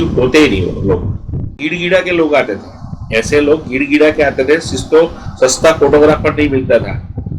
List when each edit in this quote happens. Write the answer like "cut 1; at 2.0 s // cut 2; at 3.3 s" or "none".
cut 1; at 1.5 s